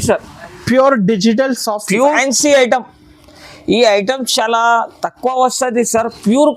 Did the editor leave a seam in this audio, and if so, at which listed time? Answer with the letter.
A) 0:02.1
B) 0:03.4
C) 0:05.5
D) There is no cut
A